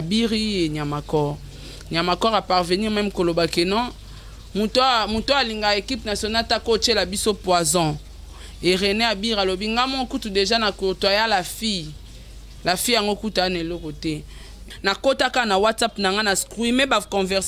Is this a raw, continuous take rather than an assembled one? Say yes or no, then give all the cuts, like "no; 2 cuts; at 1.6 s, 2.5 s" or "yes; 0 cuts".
no; 1 cut; at 14.8 s